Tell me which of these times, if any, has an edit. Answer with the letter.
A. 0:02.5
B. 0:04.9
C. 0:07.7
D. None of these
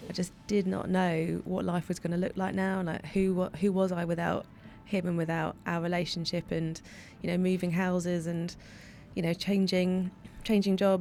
D